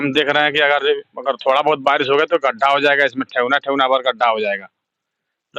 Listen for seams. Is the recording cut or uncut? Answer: uncut